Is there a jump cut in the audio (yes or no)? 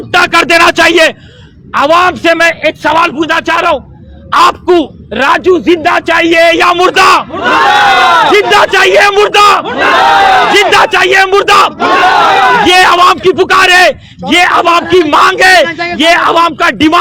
no